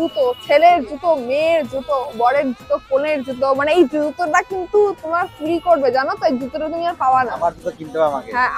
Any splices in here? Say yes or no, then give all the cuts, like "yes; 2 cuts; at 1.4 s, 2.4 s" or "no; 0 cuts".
no; 0 cuts